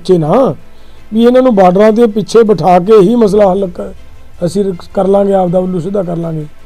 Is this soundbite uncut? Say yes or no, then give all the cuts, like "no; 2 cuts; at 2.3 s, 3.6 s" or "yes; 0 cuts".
yes; 0 cuts